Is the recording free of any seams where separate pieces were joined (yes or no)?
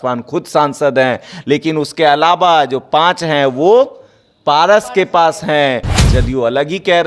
no